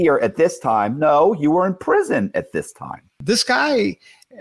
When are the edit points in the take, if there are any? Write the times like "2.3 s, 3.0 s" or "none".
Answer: 3.2 s